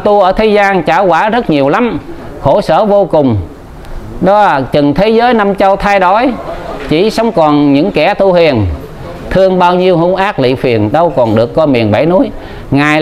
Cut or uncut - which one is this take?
uncut